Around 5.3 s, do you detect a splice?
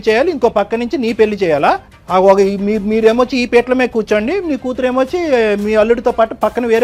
no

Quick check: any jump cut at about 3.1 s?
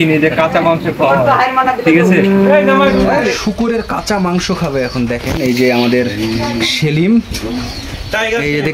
yes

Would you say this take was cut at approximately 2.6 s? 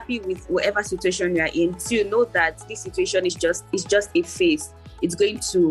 no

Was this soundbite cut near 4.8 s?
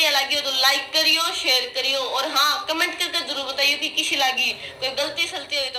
no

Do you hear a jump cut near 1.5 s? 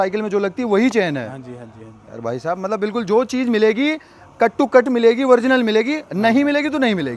no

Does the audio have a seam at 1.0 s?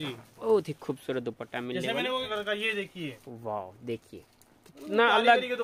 no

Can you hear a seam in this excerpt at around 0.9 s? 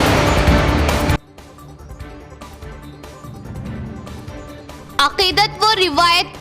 yes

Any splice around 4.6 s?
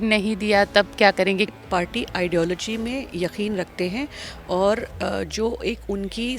no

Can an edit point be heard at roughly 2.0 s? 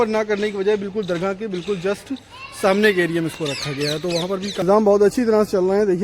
no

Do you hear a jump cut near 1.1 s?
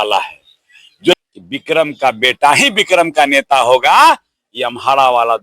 yes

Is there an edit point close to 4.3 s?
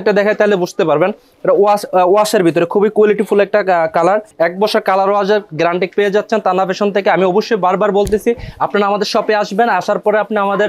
yes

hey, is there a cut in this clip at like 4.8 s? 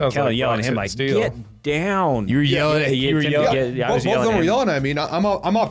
no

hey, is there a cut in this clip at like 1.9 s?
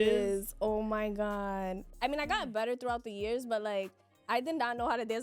yes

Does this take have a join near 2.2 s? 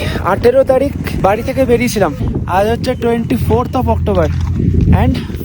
yes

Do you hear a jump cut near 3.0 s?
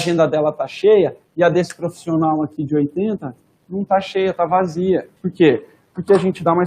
no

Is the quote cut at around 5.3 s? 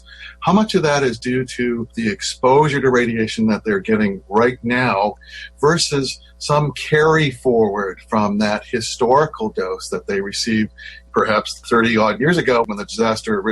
yes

